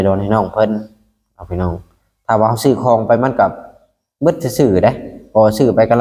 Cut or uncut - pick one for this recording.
uncut